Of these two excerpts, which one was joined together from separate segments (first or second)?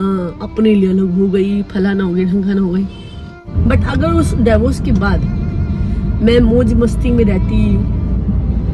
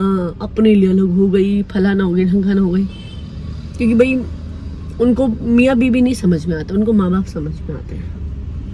first